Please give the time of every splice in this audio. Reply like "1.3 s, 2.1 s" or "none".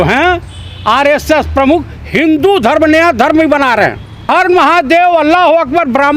4.3 s